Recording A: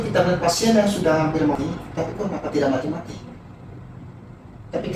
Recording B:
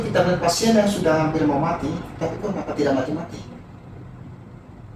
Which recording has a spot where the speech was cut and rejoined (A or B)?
A